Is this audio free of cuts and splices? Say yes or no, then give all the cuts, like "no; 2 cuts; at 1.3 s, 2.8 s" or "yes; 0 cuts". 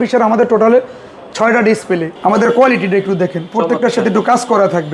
no; 1 cut; at 2.1 s